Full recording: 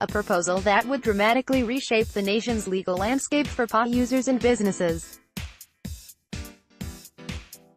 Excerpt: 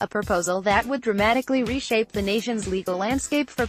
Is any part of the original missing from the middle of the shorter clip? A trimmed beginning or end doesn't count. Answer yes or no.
no